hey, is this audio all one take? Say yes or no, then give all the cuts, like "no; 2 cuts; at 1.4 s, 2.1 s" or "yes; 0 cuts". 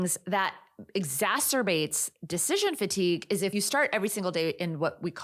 yes; 0 cuts